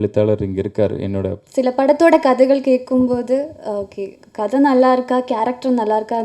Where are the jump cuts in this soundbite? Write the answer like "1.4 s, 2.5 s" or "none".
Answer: 1.4 s

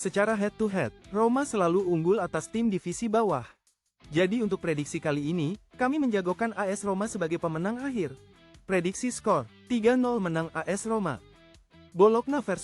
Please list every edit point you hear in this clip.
1.0 s

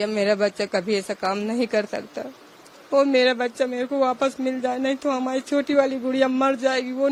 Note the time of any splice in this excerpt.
none

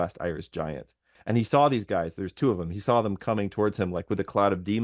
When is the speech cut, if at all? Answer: 1.1 s

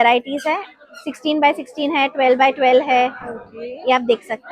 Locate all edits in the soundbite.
none

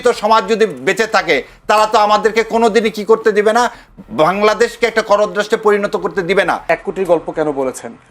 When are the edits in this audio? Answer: 6.6 s

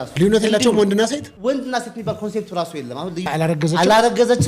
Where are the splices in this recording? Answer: 3.2 s

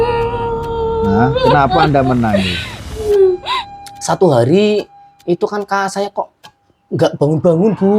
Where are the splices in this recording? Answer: 3.6 s

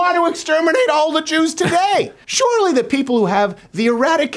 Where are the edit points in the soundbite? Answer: 2.2 s

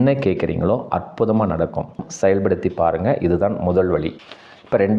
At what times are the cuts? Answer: 2.0 s

